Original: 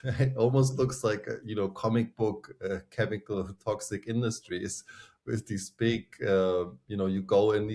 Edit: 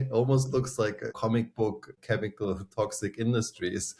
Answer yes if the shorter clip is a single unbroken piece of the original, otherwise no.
no